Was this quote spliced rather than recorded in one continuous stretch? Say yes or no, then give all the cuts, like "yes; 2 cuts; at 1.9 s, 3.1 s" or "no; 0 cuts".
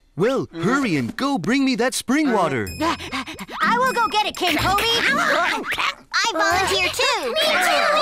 no; 0 cuts